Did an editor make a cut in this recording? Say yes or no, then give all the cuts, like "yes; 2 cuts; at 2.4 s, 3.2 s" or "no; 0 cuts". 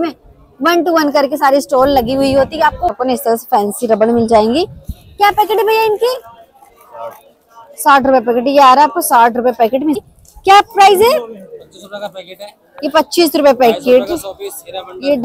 yes; 2 cuts; at 3.0 s, 10.0 s